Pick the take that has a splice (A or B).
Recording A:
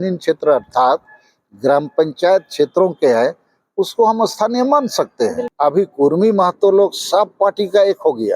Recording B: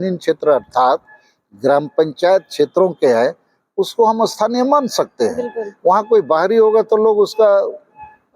A